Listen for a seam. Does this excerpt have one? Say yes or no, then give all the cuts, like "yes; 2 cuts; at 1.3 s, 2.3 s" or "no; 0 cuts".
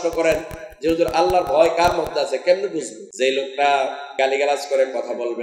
yes; 2 cuts; at 3.0 s, 4.0 s